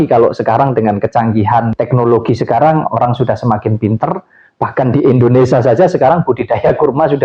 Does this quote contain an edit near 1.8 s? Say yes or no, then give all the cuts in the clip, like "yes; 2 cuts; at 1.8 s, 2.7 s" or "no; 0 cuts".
yes; 1 cut; at 1.8 s